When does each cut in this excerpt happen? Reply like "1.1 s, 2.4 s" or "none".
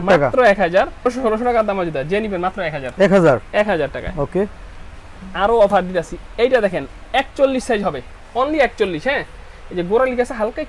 none

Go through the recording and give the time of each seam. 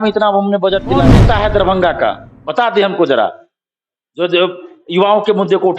1.1 s

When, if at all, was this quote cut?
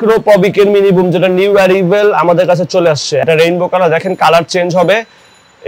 3.2 s

